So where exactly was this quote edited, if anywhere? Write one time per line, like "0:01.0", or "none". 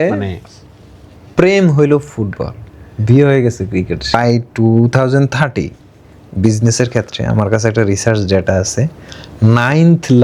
0:04.1